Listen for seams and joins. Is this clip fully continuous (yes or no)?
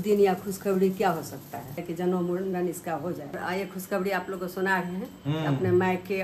no